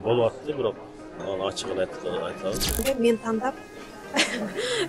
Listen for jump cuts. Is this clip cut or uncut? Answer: cut